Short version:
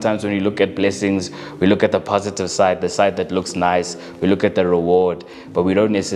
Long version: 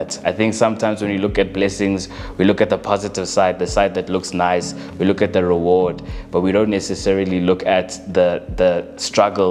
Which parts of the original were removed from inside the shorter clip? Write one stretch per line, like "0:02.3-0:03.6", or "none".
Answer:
none